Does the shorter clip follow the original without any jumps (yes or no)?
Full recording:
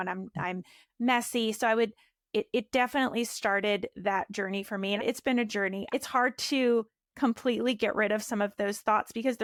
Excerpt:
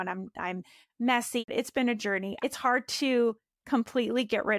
no